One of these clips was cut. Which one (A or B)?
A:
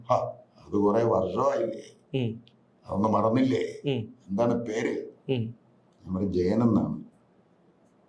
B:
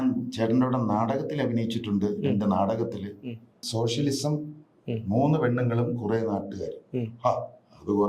B